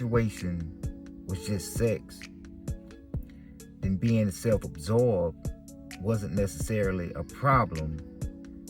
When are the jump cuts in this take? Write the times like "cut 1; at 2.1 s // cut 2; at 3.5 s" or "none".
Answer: cut 1; at 2.0 s // cut 2; at 3.8 s